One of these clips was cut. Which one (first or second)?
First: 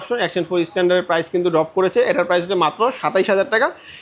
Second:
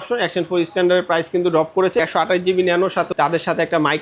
second